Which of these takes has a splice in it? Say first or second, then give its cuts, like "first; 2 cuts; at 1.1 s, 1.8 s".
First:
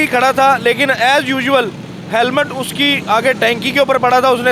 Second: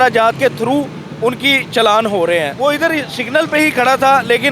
second; 1 cut; at 2.5 s